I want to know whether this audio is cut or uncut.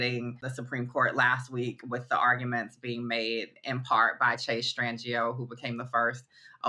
uncut